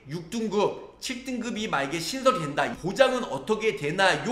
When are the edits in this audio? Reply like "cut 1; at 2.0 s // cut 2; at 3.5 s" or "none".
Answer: cut 1; at 2.7 s